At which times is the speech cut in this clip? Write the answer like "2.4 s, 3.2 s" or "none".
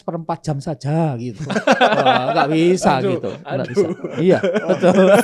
none

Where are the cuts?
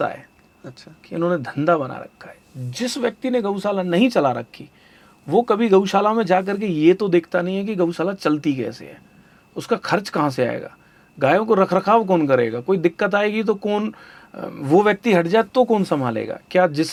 none

